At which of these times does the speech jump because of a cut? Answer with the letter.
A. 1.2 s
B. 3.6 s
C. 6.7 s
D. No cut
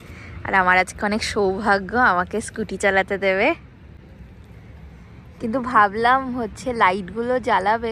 D